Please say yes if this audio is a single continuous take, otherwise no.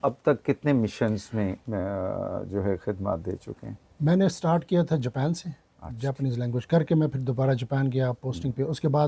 yes